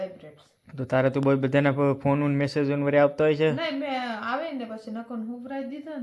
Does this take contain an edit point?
no; 0 cuts

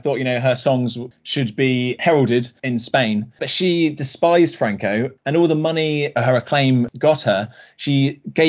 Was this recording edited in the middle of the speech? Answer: yes; 2 cuts; at 2.6 s, 5.1 s

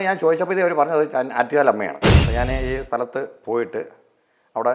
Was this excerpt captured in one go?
no; 1 cut; at 2.0 s

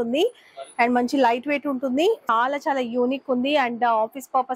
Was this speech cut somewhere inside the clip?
yes; 1 cut; at 2.2 s

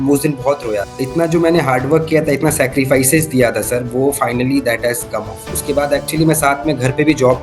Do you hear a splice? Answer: yes; 2 cuts; at 0.9 s, 5.5 s

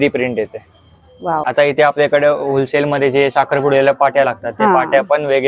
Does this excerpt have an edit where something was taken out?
yes; 1 cut; at 1.4 s

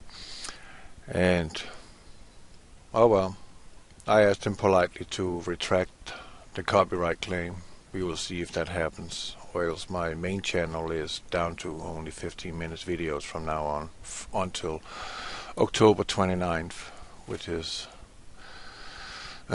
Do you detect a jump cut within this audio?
yes; 1 cut; at 9.8 s

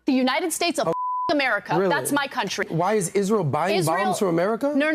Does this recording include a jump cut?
yes; 1 cut; at 2.7 s

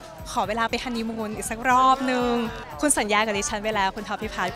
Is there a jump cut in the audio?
yes; 1 cut; at 2.6 s

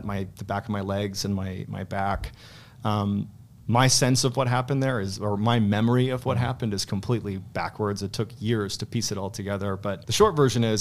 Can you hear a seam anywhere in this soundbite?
no; 0 cuts

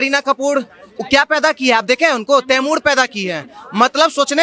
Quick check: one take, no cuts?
yes; 0 cuts

